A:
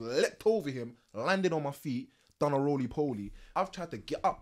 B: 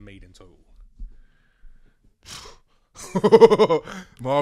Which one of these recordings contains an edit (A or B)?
A